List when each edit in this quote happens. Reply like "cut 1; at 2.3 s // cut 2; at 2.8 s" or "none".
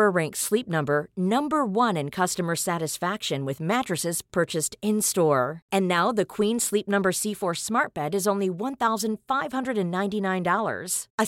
none